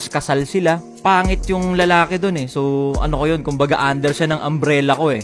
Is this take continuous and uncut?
yes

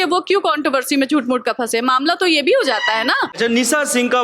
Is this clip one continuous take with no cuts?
yes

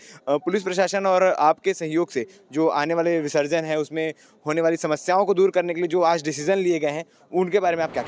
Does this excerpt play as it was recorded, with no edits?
yes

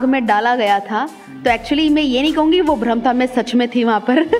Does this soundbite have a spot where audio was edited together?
no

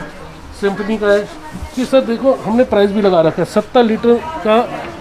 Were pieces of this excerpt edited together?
no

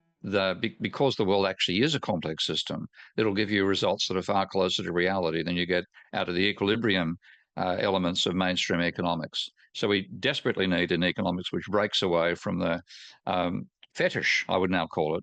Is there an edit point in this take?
no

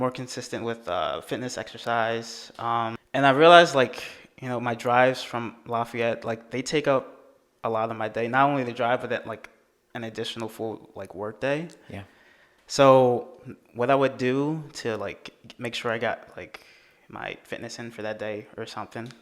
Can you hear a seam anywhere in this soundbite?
yes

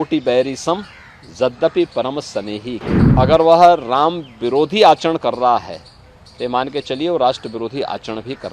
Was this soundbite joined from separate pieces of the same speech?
yes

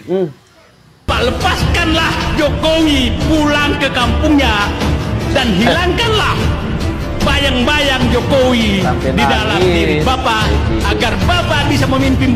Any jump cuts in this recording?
yes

